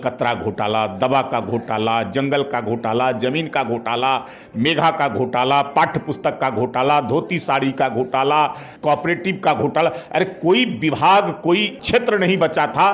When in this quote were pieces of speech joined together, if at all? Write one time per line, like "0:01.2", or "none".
0:08.7
0:11.8